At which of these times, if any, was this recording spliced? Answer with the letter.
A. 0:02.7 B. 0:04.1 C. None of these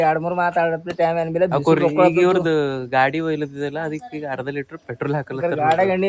C